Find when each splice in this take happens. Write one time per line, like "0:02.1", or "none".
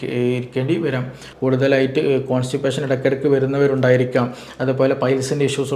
0:01.3